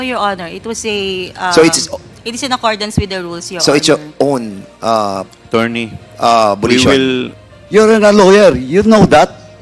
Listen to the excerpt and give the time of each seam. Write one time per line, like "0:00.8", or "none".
0:07.3